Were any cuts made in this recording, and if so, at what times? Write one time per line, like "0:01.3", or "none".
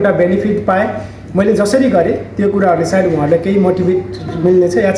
none

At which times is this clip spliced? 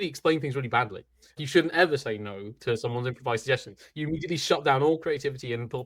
0:01.4

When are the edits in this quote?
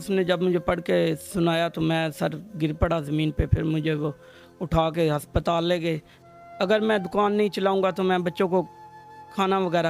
0:06.1

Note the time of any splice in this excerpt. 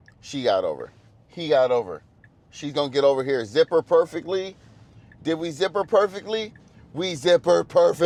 none

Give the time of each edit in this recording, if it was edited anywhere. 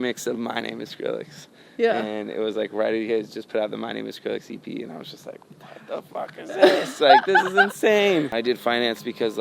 0:08.3

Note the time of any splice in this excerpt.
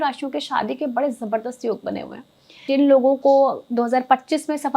0:02.7

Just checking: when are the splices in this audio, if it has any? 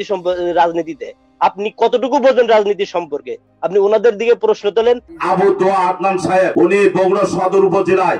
0:05.1
0:06.5

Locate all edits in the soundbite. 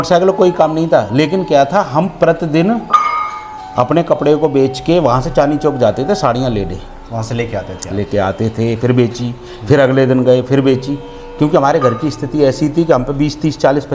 none

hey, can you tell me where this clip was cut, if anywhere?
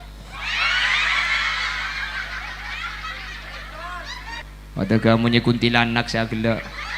0:04.4

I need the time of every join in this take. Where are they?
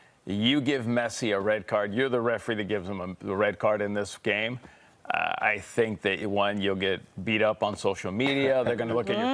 none

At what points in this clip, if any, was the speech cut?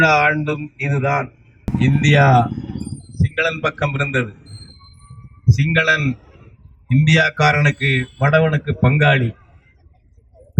0:01.5

